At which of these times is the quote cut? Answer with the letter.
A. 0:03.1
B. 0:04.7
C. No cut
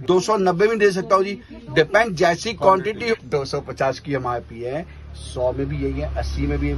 A